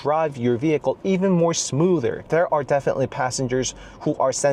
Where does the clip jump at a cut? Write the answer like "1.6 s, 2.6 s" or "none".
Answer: none